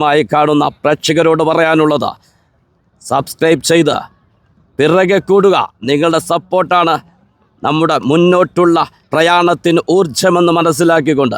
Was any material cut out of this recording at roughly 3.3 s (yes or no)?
no